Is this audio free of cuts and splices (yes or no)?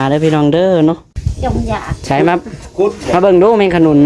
no